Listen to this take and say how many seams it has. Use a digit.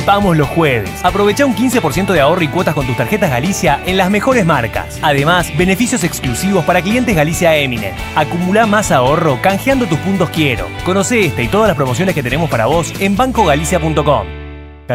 0